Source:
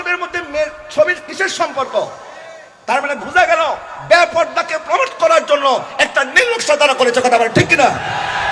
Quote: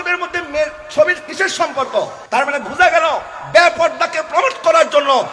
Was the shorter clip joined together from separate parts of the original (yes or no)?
yes